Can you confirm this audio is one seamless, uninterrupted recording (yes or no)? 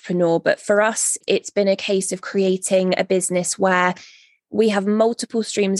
yes